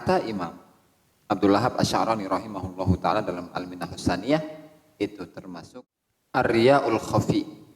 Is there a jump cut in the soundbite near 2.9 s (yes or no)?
no